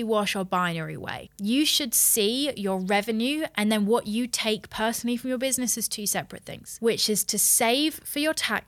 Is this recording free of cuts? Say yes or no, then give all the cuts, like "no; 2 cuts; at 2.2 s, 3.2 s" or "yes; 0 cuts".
no; 2 cuts; at 1.2 s, 6.8 s